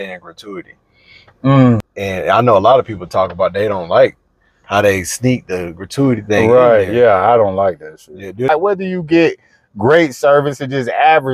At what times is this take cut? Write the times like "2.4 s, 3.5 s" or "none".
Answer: 1.9 s, 8.5 s